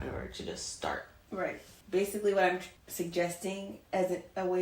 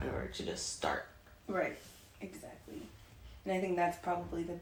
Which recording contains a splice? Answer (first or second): first